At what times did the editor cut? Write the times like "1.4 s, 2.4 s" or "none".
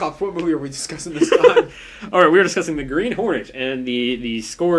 3.7 s